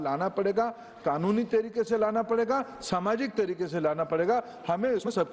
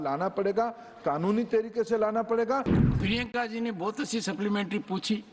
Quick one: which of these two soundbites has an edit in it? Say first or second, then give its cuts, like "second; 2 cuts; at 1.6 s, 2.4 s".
second; 1 cut; at 2.8 s